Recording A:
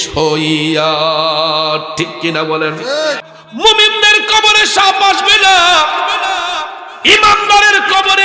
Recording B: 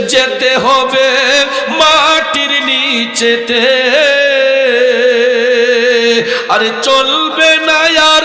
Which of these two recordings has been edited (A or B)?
A